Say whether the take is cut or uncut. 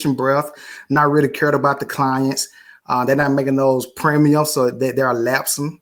uncut